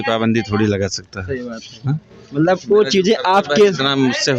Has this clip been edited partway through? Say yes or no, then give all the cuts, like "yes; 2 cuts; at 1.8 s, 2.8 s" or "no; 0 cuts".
no; 0 cuts